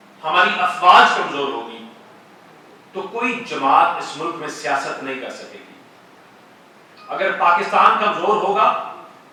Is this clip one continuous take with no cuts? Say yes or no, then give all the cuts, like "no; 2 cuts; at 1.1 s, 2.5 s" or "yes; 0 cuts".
yes; 0 cuts